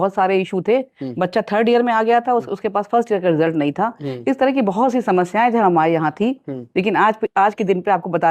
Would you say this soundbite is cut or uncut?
uncut